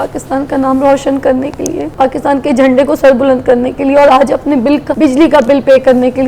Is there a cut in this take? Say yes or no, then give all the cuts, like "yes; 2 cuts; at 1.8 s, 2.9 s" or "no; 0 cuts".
yes; 2 cuts; at 1.9 s, 4.9 s